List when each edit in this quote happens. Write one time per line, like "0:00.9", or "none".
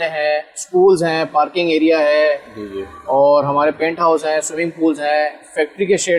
none